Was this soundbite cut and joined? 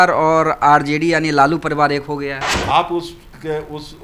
yes; 1 cut; at 2.5 s

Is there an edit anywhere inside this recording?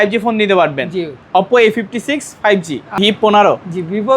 yes; 1 cut; at 2.8 s

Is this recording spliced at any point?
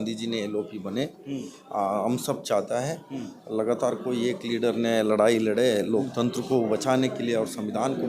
no; 0 cuts

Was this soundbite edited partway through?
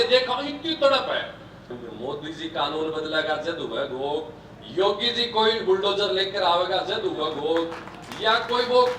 yes; 1 cut; at 1.7 s

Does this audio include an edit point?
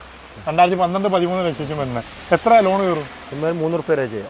no; 0 cuts

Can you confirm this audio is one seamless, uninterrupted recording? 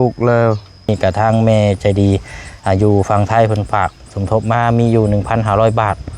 no; 1 cut; at 0.9 s

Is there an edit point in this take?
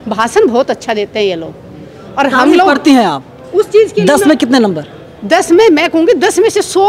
no; 0 cuts

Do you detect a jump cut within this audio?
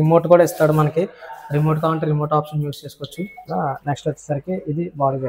yes; 1 cut; at 3.4 s

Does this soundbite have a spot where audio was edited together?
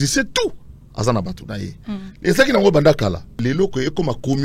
yes; 1 cut; at 3.4 s

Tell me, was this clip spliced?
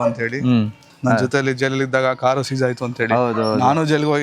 yes; 1 cut; at 0.9 s

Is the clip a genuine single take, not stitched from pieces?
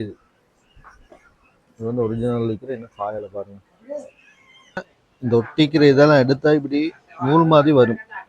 no; 1 cut; at 4.9 s

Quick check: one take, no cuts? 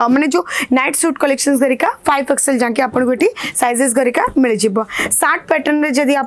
yes; 0 cuts

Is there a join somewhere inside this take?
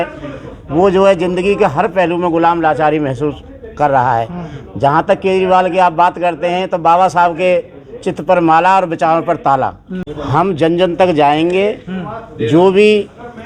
no; 0 cuts

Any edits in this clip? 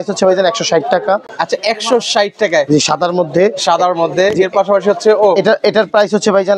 no; 0 cuts

